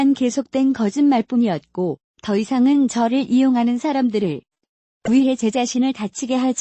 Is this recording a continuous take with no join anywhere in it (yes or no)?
yes